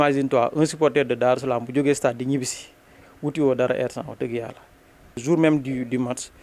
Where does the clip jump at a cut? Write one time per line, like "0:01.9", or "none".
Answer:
0:05.2